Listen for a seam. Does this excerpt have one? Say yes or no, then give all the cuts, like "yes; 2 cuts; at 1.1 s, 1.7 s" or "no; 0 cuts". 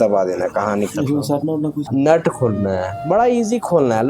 yes; 1 cut; at 1.8 s